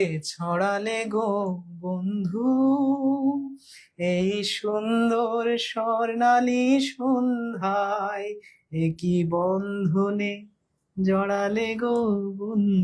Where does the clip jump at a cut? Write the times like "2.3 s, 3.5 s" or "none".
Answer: none